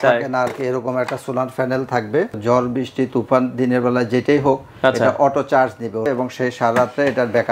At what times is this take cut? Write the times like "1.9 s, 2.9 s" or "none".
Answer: 2.3 s, 6.1 s

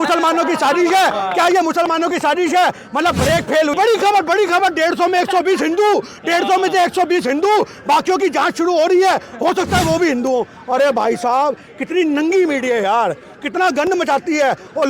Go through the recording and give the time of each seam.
3.7 s

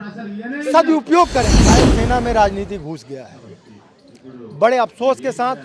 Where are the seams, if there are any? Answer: 1.8 s

